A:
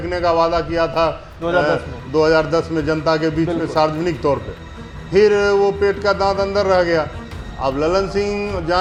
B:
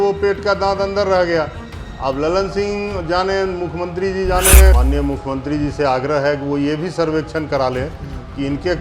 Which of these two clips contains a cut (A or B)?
B